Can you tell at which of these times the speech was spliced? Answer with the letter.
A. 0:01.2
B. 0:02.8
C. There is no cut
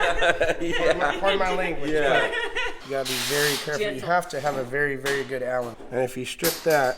B